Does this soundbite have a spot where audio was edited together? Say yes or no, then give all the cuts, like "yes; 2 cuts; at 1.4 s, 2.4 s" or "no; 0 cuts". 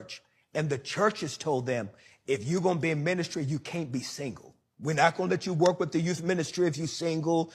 yes; 2 cuts; at 5.0 s, 6.1 s